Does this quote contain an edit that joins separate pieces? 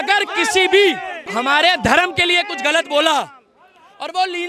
yes; 1 cut; at 1.2 s

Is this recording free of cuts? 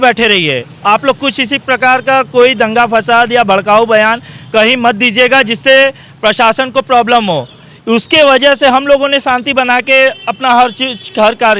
yes; 0 cuts

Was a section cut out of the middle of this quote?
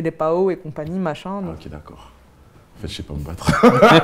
yes; 1 cut; at 1.5 s

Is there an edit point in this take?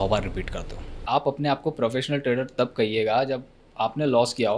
yes; 1 cut; at 0.9 s

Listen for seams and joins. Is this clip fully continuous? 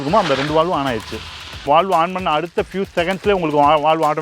no; 1 cut; at 1.6 s

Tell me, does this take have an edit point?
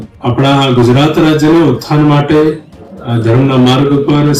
no; 0 cuts

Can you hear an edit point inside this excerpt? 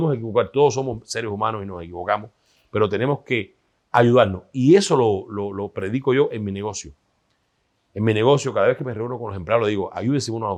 no; 0 cuts

